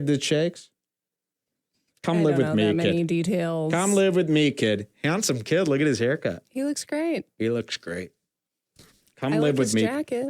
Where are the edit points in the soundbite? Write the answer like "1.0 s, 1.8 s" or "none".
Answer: none

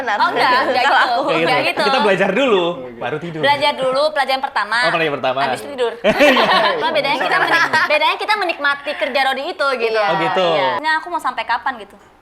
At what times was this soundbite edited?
6.8 s, 10.8 s

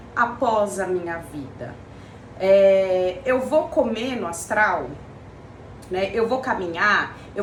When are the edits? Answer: none

